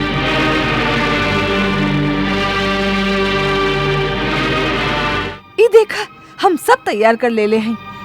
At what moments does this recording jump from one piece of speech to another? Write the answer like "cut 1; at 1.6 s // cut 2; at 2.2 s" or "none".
cut 1; at 5.3 s